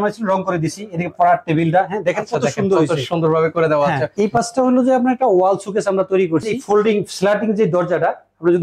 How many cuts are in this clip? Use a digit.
2